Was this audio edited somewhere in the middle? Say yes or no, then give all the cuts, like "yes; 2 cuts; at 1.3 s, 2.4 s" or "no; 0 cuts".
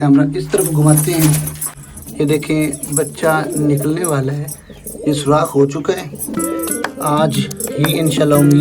yes; 1 cut; at 1.6 s